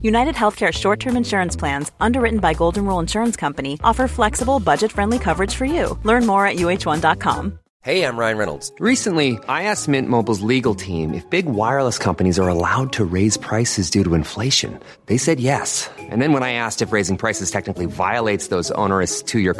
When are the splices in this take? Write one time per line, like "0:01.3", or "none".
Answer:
0:07.6